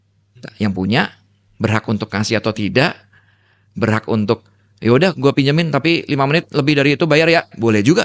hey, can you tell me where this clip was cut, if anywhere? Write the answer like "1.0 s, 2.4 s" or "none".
none